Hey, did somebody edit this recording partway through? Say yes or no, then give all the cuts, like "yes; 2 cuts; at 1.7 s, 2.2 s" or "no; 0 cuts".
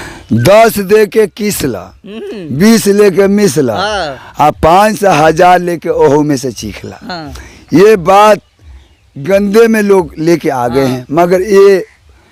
no; 0 cuts